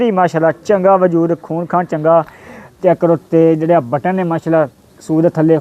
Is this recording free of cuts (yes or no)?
no